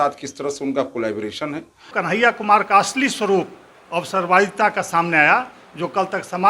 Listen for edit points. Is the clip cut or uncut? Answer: cut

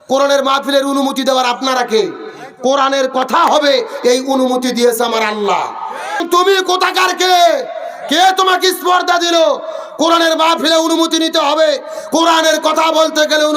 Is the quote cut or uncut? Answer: cut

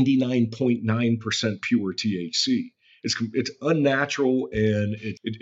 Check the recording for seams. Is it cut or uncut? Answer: uncut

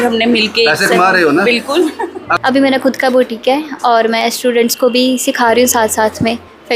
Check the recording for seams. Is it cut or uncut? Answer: cut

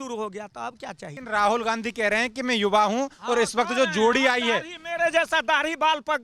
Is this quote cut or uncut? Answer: cut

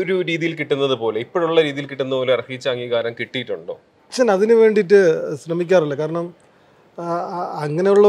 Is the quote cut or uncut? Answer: cut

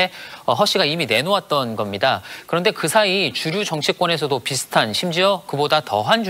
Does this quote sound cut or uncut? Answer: uncut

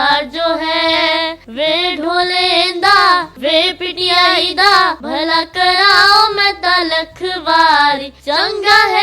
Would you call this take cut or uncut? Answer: cut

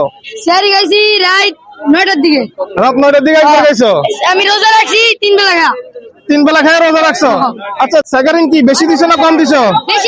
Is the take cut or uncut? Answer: cut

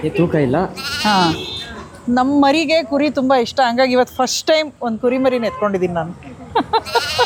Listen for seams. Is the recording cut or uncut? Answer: uncut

